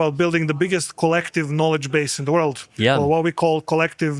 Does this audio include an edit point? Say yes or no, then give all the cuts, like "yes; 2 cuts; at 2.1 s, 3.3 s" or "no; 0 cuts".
no; 0 cuts